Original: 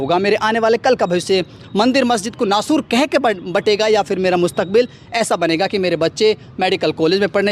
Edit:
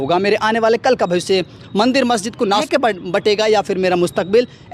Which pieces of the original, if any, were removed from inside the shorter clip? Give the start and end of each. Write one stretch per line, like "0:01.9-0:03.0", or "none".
0:02.6-0:03.1